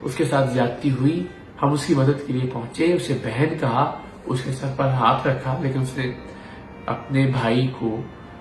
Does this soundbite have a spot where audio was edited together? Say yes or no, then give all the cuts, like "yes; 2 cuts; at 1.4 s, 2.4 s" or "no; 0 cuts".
no; 0 cuts